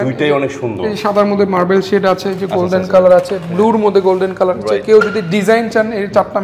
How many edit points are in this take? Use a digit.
0